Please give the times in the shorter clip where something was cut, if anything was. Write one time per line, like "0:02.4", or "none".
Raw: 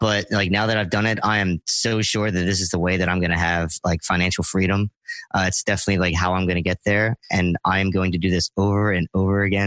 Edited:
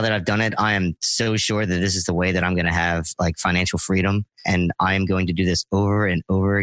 0:04.3